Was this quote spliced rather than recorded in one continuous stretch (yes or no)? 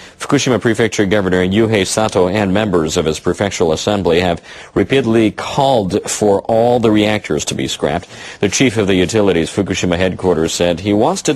no